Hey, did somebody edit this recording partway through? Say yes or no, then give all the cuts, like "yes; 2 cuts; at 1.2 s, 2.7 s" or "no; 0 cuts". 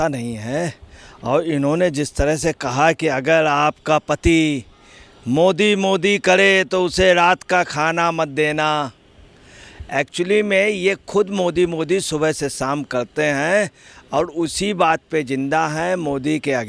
no; 0 cuts